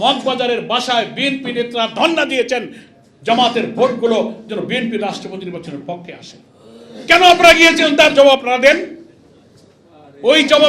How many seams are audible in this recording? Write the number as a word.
zero